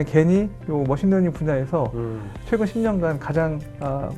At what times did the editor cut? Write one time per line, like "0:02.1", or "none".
none